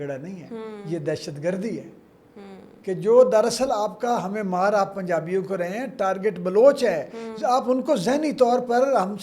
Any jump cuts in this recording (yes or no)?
no